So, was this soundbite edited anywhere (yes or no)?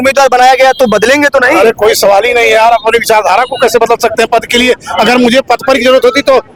no